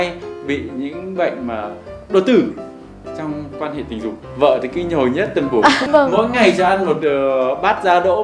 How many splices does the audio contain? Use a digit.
2